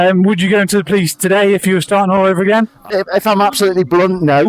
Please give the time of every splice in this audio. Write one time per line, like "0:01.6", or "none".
0:02.9